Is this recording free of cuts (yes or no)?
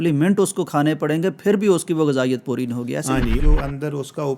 no